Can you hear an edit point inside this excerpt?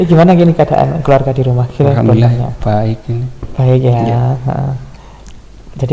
no; 0 cuts

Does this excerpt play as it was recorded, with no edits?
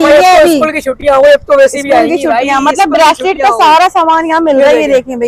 yes; 0 cuts

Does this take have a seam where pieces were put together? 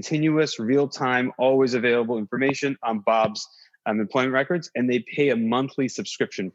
no; 0 cuts

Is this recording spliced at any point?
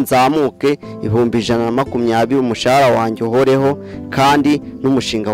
no; 0 cuts

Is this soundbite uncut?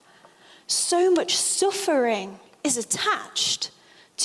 yes; 0 cuts

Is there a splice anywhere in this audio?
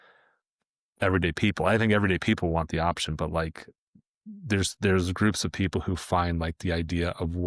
no; 0 cuts

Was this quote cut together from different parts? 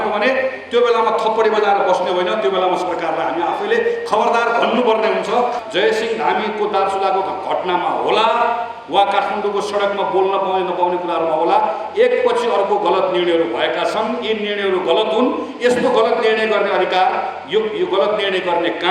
yes; 1 cut; at 5.6 s

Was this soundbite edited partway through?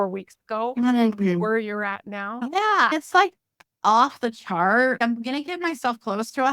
no; 0 cuts

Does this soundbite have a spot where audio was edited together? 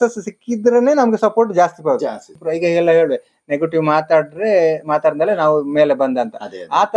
yes; 1 cut; at 2.3 s

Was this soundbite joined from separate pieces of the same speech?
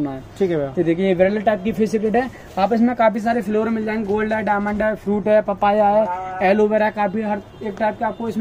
no; 0 cuts

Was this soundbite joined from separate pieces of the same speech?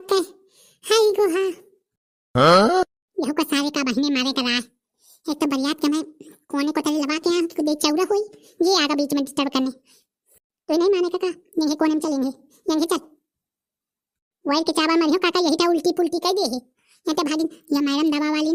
no; 0 cuts

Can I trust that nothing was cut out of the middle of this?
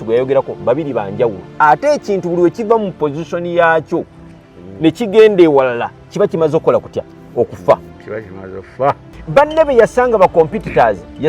no; 1 cut; at 9.1 s

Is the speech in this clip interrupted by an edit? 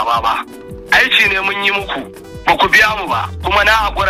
no; 0 cuts

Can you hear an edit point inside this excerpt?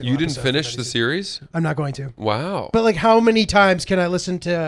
yes; 1 cut; at 2.7 s

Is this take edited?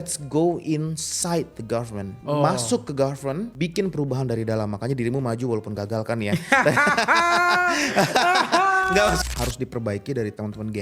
yes; 3 cuts; at 2.1 s, 3.5 s, 9.2 s

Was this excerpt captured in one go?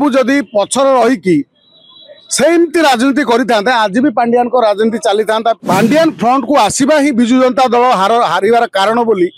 no; 1 cut; at 5.6 s

